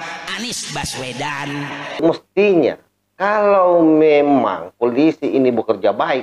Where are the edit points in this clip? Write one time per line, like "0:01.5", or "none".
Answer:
0:02.0